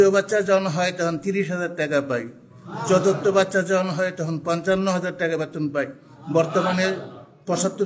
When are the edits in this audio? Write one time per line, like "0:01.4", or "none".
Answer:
none